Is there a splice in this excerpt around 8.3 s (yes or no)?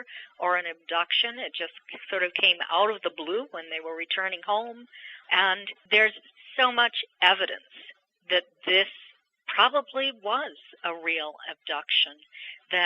no